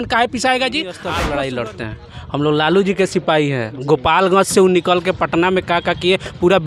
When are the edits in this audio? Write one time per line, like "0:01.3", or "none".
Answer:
0:01.1